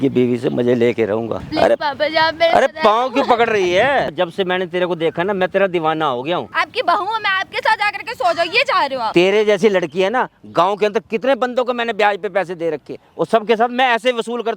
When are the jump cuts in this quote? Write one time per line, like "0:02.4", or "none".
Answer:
0:01.5
0:04.1
0:06.5
0:09.1
0:13.0